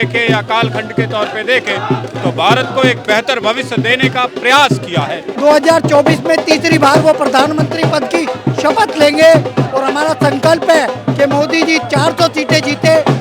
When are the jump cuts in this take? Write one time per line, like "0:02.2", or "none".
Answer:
0:05.3

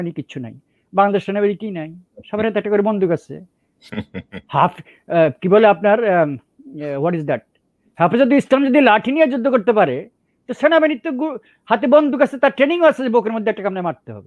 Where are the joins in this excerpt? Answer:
none

